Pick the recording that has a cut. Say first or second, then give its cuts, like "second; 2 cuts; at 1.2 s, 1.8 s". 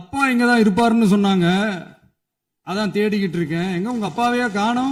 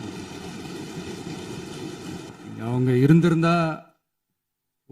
second; 1 cut; at 2.3 s